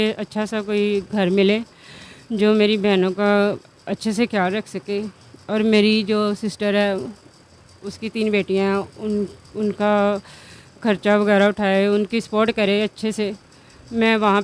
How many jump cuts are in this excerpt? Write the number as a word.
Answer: zero